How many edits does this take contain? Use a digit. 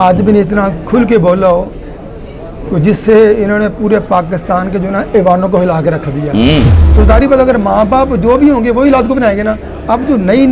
1